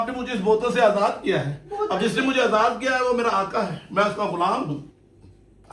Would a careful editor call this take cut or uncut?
cut